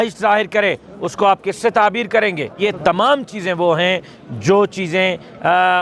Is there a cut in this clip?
yes; 1 cut; at 2.5 s

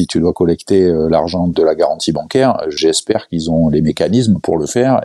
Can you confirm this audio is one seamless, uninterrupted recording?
no; 2 cuts; at 1.5 s, 2.8 s

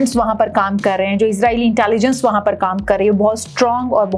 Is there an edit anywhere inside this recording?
no; 0 cuts

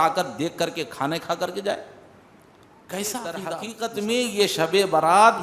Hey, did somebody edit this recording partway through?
yes; 1 cut; at 3.6 s

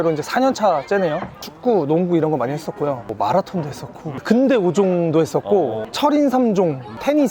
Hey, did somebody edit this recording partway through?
yes; 2 cuts; at 1.4 s, 3.1 s

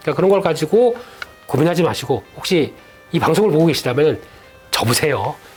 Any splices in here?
no; 0 cuts

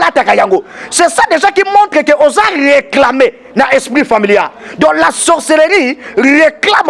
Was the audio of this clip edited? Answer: no; 0 cuts

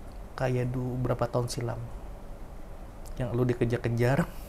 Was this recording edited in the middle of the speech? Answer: no; 0 cuts

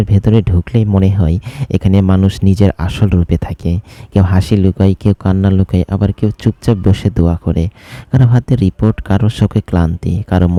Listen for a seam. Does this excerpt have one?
no; 0 cuts

